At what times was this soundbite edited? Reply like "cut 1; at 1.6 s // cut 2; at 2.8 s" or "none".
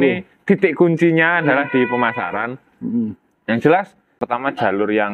cut 1; at 4.2 s